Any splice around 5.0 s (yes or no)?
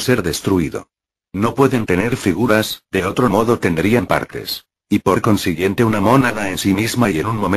no